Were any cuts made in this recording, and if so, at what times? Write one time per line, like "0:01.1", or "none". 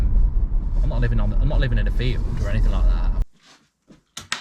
0:03.1

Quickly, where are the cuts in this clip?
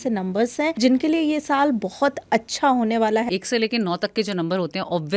0:00.8
0:03.3

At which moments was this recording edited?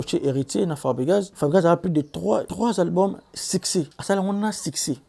0:01.3
0:02.5
0:04.0

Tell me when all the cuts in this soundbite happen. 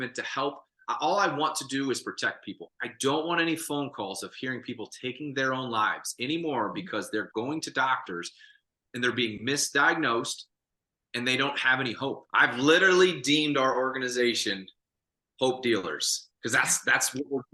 0:02.6
0:12.2

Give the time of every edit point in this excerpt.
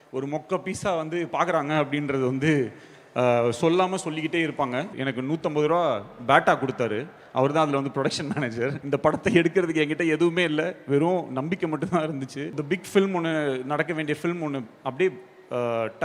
0:04.9
0:08.8
0:12.5

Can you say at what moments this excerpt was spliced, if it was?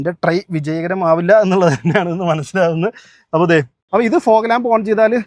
0:03.9

